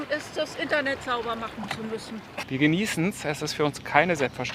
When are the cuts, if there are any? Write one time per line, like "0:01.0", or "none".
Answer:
0:02.4